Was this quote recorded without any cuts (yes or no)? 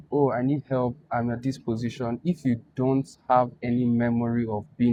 yes